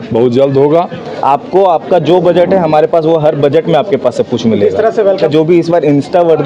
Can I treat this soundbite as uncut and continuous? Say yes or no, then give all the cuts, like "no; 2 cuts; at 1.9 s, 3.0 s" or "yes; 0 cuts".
no; 2 cuts; at 1.0 s, 5.2 s